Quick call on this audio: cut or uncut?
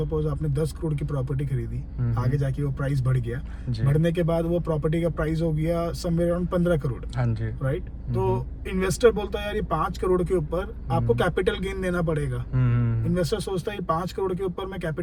uncut